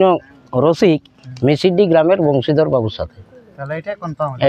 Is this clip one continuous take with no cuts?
yes; 0 cuts

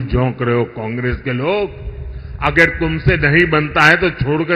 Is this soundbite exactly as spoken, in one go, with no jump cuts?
yes; 0 cuts

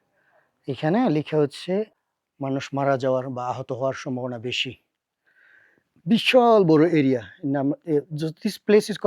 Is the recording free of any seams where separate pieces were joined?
no; 1 cut; at 1.9 s

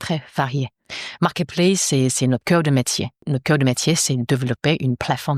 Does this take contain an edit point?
yes; 1 cut; at 3.3 s

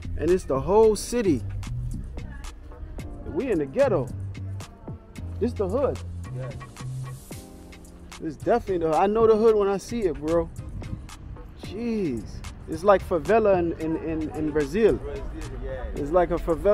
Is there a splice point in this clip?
no; 0 cuts

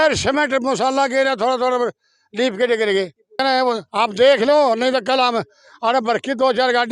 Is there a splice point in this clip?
yes; 1 cut; at 3.4 s

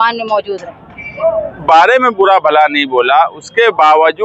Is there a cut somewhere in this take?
yes; 1 cut; at 1.6 s

